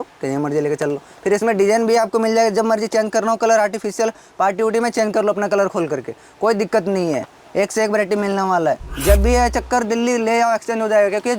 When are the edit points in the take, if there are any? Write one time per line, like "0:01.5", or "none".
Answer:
0:08.9